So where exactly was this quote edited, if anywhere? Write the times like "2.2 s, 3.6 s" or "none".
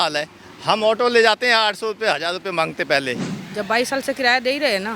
3.3 s